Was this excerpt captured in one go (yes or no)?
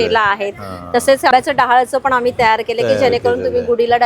no